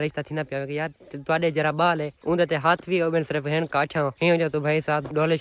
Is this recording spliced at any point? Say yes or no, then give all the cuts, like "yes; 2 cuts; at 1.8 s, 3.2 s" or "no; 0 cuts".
no; 0 cuts